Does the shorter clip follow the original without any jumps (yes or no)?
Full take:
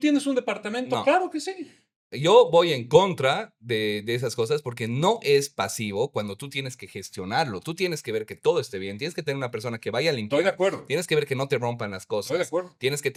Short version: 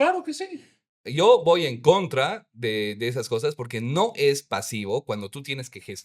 yes